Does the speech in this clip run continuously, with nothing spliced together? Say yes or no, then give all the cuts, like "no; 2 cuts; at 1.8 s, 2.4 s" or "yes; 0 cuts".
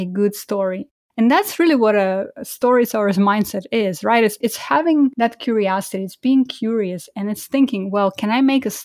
yes; 0 cuts